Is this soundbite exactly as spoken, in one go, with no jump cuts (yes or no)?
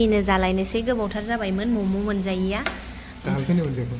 yes